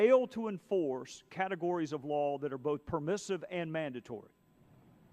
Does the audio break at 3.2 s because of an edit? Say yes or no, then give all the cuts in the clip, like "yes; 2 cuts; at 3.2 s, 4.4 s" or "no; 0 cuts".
yes; 1 cut; at 3.2 s